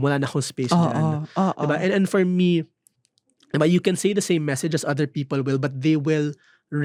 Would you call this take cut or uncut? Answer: uncut